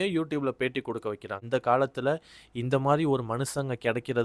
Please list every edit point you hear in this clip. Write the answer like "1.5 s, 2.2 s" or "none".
1.4 s

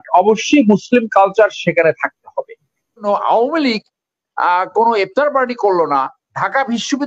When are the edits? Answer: 3.0 s

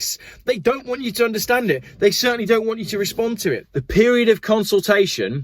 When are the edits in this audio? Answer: 3.6 s

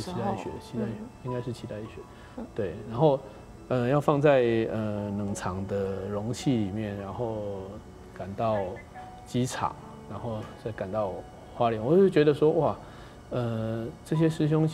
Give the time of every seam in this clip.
none

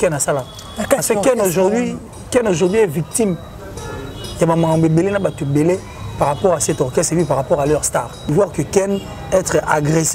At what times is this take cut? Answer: 8.3 s

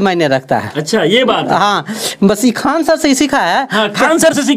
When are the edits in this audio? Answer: none

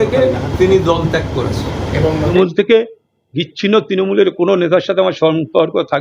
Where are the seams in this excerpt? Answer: 2.2 s

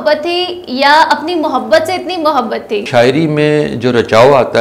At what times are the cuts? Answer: 2.9 s

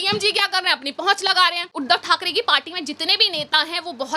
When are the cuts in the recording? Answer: 1.7 s

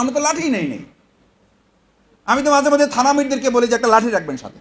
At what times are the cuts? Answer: none

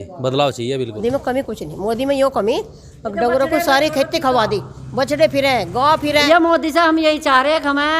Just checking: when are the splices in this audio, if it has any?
1.3 s, 6.2 s

